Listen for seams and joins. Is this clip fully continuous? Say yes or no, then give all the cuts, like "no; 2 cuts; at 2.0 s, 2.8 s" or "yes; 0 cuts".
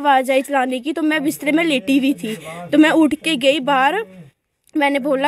yes; 0 cuts